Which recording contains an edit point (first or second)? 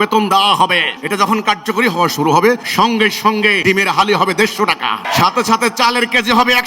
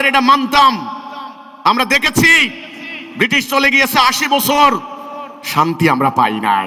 first